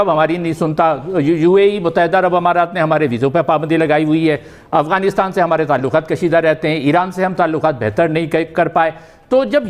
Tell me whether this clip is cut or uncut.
uncut